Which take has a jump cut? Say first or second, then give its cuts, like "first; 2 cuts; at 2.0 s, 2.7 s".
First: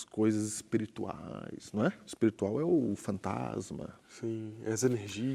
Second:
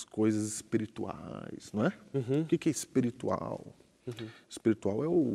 first; 1 cut; at 2.0 s